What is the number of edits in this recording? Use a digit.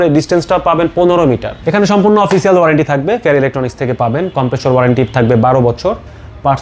1